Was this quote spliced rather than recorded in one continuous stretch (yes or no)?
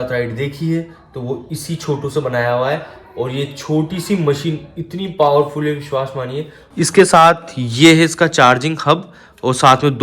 yes